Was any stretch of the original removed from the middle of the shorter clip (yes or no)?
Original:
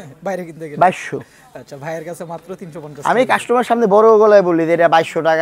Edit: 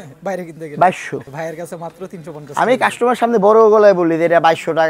yes